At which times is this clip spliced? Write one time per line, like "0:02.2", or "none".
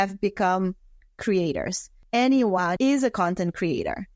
0:01.9
0:02.7